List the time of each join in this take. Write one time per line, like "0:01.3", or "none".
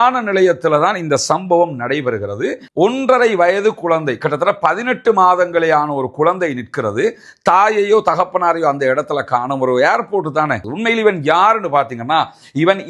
0:10.7